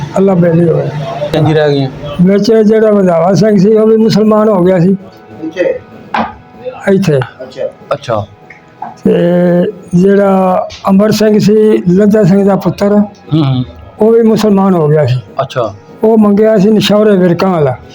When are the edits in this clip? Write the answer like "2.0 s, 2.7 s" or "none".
1.3 s